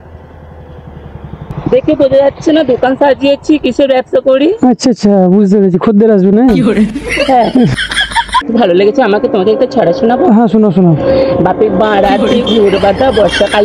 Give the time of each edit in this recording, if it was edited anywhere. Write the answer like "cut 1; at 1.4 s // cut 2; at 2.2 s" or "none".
cut 1; at 1.5 s // cut 2; at 8.5 s